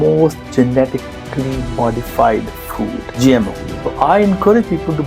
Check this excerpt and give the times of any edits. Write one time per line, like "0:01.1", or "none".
0:03.0
0:03.6